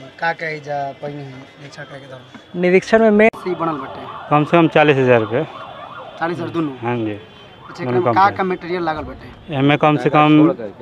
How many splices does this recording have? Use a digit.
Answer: 1